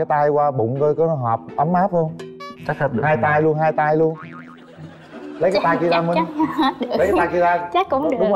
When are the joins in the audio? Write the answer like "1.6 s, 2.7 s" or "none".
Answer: none